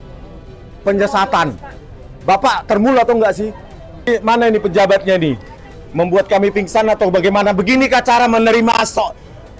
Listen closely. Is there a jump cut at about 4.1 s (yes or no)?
yes